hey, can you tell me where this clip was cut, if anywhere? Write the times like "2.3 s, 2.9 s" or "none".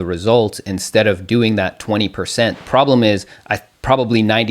2.6 s

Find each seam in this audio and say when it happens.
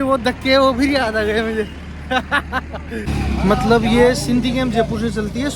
3.0 s

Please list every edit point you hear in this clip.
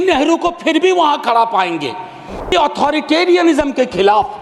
2.5 s

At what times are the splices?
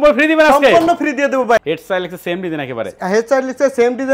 1.6 s

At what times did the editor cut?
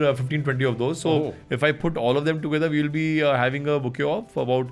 none

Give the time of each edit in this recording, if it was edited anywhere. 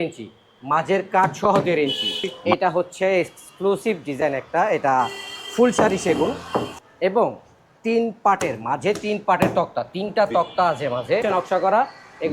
2.4 s, 6.7 s, 11.2 s

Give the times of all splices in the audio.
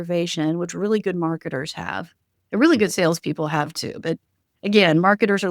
none

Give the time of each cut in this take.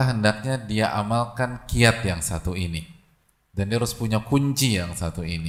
none

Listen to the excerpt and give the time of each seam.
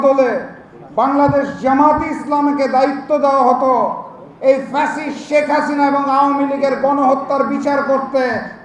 none

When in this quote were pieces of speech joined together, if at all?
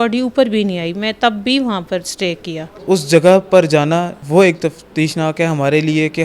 2.7 s, 4.2 s

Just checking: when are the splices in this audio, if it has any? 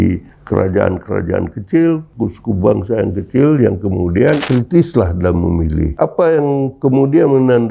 4.4 s

